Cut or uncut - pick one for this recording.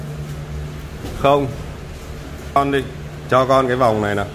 cut